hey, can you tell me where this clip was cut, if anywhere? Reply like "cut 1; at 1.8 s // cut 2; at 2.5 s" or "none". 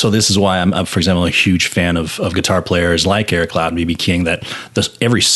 none